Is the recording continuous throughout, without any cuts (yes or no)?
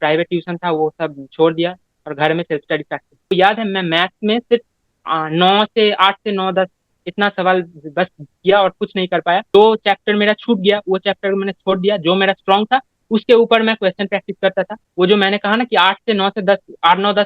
no